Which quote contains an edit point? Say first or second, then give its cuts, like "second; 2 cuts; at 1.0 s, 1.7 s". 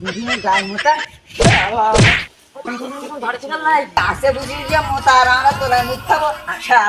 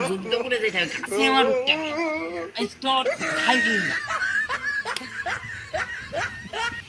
first; 1 cut; at 3.9 s